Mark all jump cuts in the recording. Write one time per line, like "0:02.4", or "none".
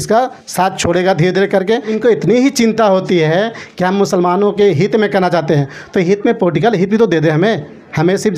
0:01.9